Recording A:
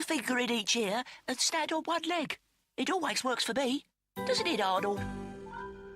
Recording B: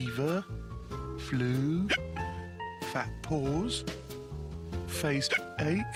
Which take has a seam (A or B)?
A